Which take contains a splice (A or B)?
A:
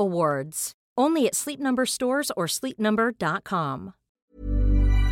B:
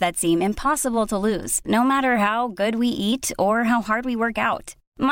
A